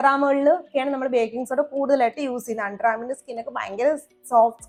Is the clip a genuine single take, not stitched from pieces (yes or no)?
yes